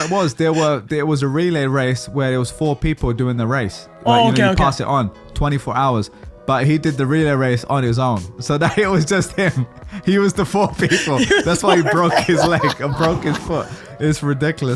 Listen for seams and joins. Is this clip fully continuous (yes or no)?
yes